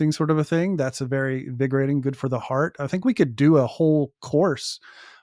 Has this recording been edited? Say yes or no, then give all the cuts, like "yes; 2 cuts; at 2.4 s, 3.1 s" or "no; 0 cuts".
no; 0 cuts